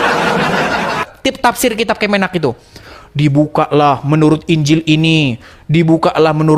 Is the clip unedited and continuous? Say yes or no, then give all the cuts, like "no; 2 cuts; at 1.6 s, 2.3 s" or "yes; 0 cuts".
no; 1 cut; at 1.1 s